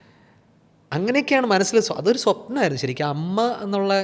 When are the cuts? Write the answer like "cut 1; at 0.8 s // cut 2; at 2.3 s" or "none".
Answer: none